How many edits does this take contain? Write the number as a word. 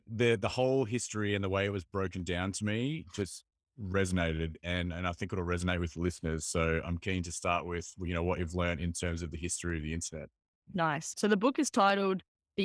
one